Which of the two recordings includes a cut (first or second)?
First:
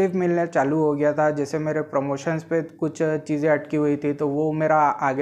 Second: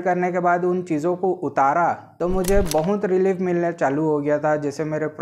second